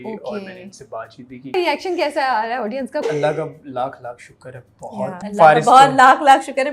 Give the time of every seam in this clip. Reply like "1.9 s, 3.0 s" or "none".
1.5 s, 3.0 s, 5.2 s